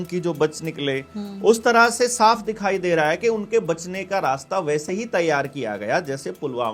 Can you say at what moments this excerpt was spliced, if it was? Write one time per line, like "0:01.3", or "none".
none